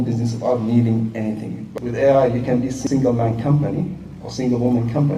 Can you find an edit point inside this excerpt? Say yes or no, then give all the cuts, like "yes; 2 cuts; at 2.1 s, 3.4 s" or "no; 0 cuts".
yes; 2 cuts; at 1.6 s, 2.8 s